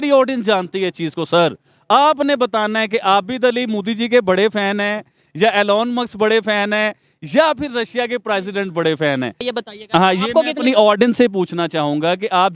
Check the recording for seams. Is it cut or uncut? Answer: cut